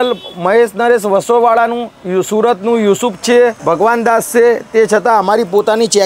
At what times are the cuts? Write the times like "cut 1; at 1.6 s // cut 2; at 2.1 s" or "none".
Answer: cut 1; at 3.6 s